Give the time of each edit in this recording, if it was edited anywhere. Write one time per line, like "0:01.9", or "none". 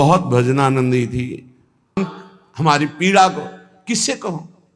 0:02.0